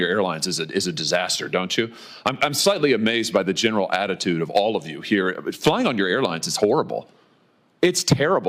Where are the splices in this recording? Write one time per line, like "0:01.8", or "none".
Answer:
none